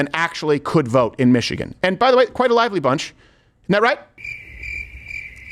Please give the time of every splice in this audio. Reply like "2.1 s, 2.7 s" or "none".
4.2 s